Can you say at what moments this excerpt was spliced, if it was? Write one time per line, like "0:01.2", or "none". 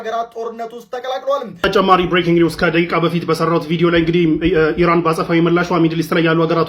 0:01.5